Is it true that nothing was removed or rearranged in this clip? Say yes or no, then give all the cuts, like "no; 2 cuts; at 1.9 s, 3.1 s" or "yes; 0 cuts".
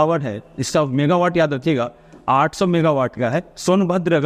yes; 0 cuts